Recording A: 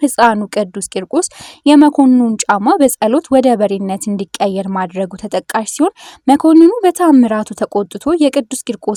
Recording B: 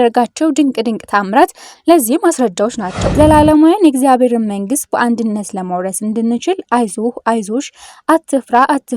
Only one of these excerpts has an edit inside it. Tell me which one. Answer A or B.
B